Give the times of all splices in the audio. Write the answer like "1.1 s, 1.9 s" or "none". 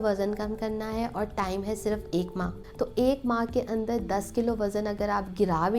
2.6 s